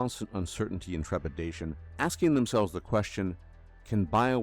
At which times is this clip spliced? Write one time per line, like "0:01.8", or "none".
0:01.0